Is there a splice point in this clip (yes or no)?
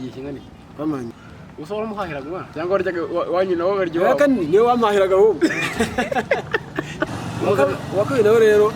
yes